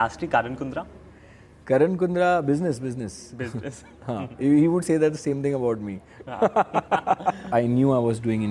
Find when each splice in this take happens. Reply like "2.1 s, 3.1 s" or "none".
7.5 s